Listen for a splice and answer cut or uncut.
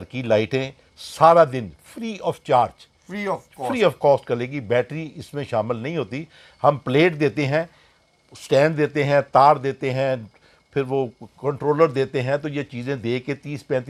uncut